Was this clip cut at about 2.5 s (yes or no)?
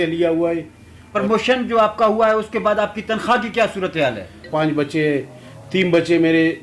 no